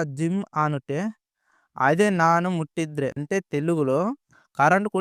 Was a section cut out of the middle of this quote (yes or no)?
yes